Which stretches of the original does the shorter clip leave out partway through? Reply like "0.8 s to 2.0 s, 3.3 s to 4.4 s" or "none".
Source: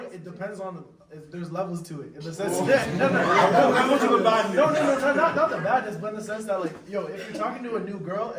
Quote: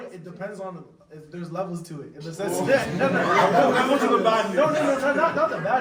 none